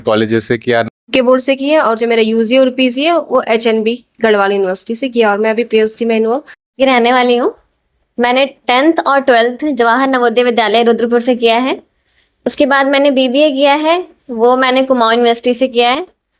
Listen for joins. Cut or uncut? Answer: cut